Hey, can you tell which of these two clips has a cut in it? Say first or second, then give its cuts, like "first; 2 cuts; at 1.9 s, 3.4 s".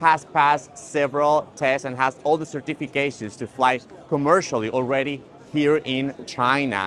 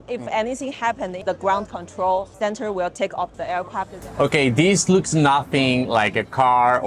second; 3 cuts; at 1.2 s, 2.3 s, 3.9 s